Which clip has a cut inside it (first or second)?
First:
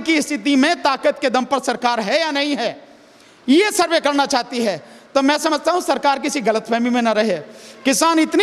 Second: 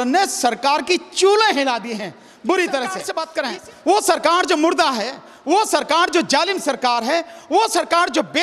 second